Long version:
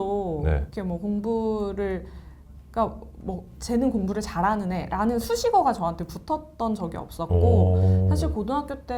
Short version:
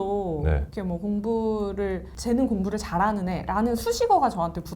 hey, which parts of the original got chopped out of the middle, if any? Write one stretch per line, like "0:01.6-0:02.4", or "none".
0:02.1-0:03.5